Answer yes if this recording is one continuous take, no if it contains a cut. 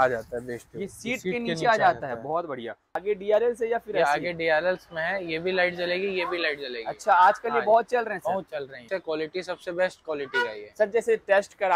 no